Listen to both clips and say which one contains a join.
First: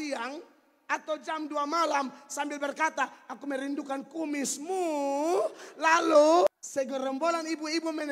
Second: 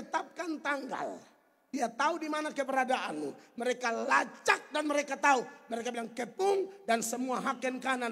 first; 1 cut; at 6.5 s

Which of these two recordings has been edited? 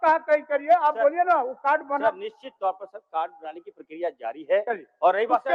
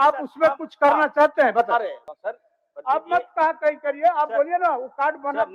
second; 1 cut; at 2.1 s

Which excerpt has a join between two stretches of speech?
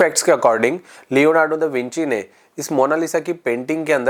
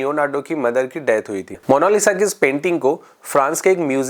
second; 1 cut; at 1.5 s

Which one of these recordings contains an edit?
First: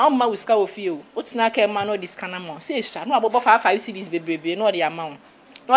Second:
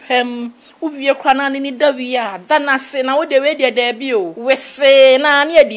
second; 1 cut; at 4.3 s

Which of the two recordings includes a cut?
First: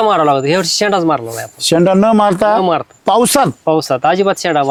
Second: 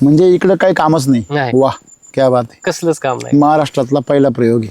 second; 1 cut; at 1.5 s

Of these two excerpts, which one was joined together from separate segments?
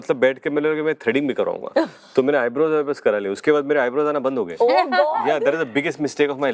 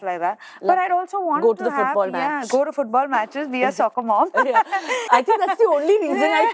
second; 1 cut; at 5.0 s

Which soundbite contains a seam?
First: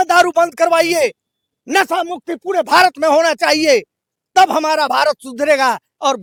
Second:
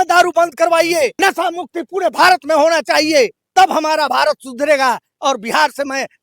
second; 2 cuts; at 1.1 s, 3.4 s

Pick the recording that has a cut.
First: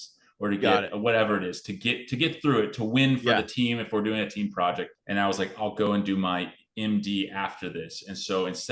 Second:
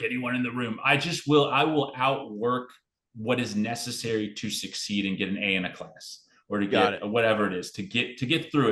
first; 1 cut; at 4.9 s

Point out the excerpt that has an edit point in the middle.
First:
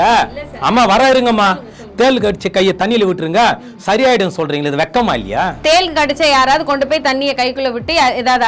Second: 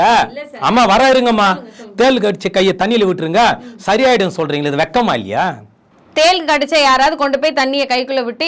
first; 1 cut; at 5.5 s

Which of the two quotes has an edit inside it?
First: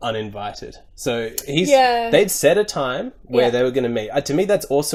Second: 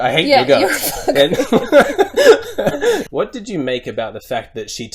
second; 1 cut; at 3.0 s

